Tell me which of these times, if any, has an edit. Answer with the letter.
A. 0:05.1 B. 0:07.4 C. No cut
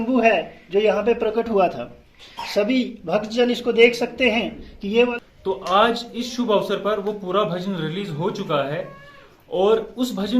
A